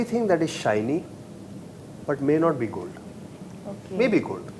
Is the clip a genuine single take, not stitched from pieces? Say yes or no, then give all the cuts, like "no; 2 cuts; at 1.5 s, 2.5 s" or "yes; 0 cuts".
yes; 0 cuts